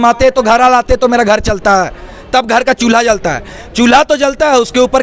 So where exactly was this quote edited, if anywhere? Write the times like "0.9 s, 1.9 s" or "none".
none